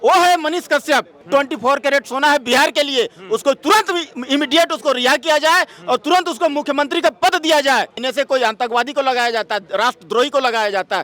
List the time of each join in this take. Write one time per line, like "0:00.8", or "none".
0:01.2
0:08.0